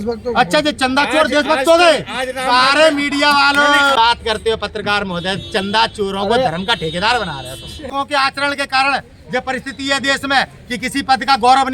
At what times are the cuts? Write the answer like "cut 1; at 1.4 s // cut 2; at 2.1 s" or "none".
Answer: cut 1; at 4.0 s // cut 2; at 7.9 s